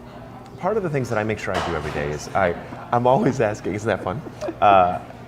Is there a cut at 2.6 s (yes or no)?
no